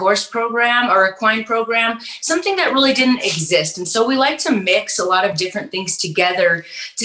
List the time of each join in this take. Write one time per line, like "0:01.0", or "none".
none